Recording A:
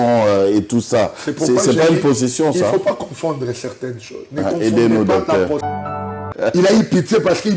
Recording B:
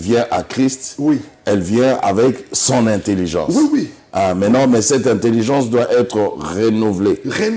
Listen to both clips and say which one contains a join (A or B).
A